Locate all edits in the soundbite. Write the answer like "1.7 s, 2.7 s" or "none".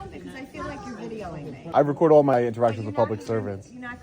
1.7 s, 2.3 s